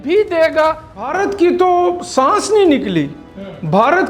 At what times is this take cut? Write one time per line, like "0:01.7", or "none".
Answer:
0:01.1